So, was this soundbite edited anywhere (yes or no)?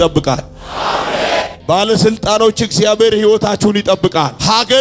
no